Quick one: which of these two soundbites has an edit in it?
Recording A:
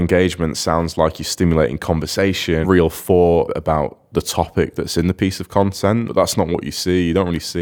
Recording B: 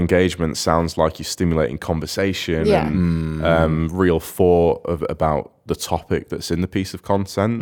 A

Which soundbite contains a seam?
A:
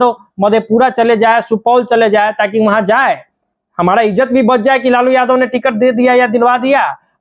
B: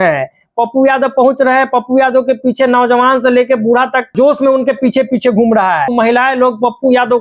B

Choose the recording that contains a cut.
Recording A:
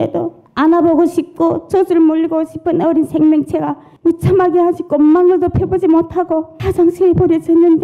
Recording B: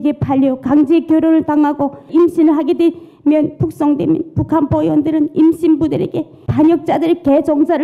B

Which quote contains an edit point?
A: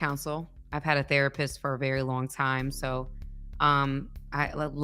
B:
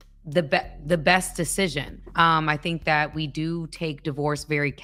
A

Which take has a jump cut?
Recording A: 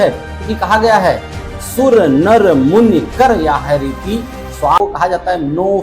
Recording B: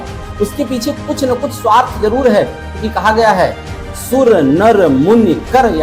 A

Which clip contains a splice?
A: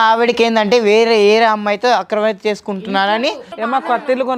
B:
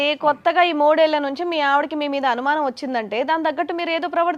A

